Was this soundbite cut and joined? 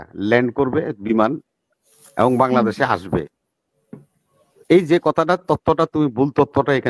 no; 0 cuts

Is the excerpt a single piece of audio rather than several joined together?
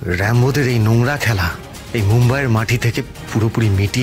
yes; 0 cuts

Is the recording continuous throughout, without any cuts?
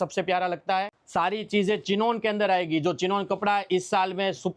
no; 1 cut; at 0.9 s

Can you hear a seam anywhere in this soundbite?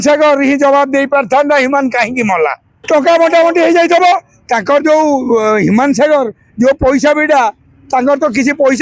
yes; 1 cut; at 2.7 s

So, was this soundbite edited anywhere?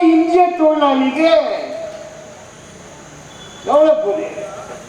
no; 0 cuts

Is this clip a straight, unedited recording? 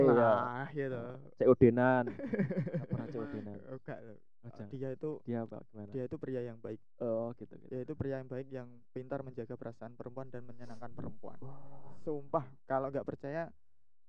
no; 2 cuts; at 3.0 s, 11.9 s

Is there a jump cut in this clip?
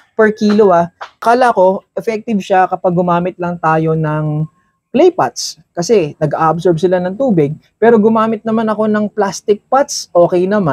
yes; 1 cut; at 1.0 s

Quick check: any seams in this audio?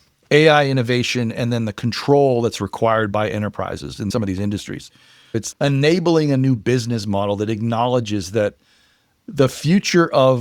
yes; 2 cuts; at 4.1 s, 5.3 s

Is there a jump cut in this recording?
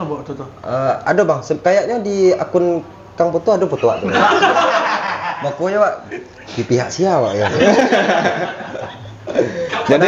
no; 0 cuts

